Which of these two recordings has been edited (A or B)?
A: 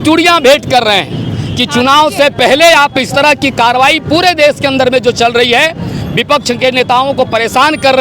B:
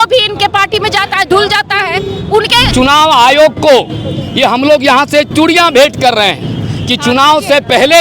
B